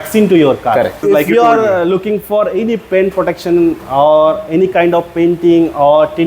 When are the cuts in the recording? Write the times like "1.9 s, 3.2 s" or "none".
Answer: 1.0 s